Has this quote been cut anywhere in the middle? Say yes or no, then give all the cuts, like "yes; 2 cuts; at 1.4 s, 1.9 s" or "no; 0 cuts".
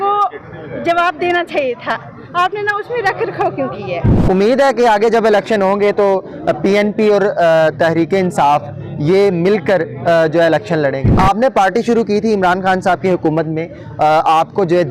yes; 2 cuts; at 4.1 s, 11.0 s